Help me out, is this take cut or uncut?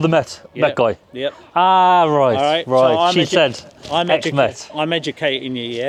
uncut